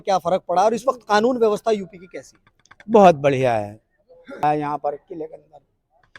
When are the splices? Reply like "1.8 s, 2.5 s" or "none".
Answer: 4.4 s